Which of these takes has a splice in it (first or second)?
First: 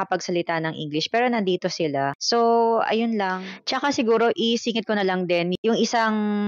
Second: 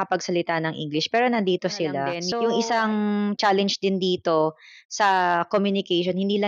second